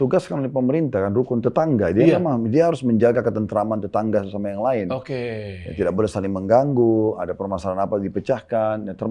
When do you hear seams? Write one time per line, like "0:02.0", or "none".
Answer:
none